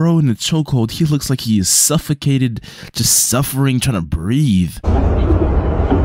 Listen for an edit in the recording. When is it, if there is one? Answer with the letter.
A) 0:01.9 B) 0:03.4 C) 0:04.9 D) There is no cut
C